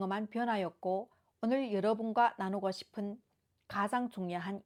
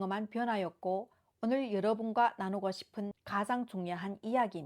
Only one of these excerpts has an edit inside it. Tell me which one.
second; 1 cut; at 3.2 s

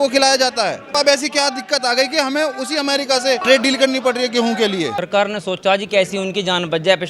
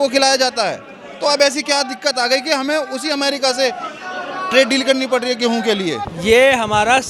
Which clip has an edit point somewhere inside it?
first; 3 cuts; at 0.9 s, 3.4 s, 5.0 s

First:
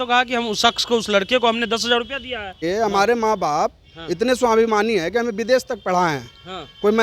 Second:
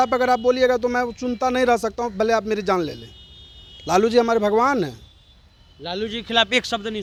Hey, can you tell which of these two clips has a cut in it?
first; 1 cut; at 2.6 s

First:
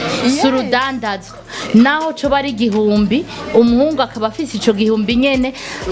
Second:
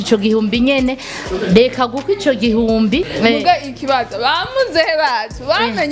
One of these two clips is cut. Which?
second; 1 cut; at 3.1 s

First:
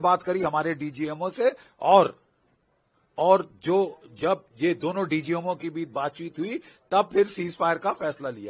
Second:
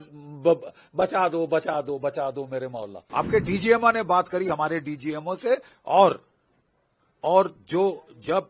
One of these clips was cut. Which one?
second; 1 cut; at 3.0 s

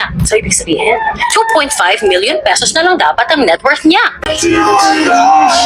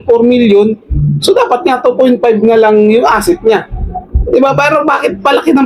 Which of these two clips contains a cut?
first; 1 cut; at 4.2 s

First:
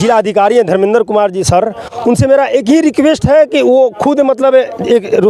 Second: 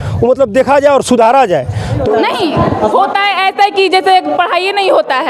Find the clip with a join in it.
second; 1 cut; at 2.0 s

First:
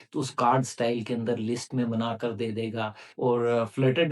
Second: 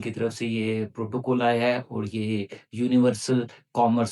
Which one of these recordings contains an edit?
first; 1 cut; at 3.1 s

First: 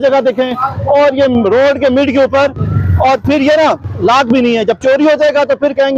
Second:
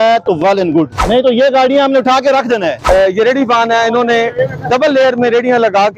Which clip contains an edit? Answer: second; 2 cuts; at 1.0 s, 2.8 s

